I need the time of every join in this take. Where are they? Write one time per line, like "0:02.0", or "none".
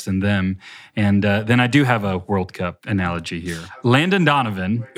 0:02.8
0:03.6